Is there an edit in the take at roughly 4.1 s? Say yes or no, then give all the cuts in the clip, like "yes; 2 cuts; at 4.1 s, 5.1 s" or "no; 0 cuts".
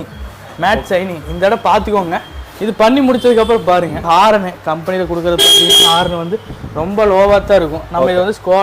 yes; 1 cut; at 4.1 s